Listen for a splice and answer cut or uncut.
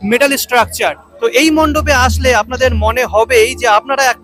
cut